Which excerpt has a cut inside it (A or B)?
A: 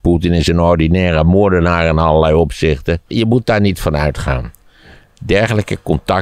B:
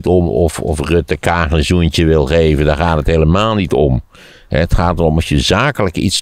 A